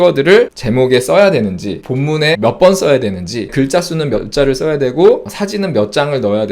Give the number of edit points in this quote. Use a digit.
2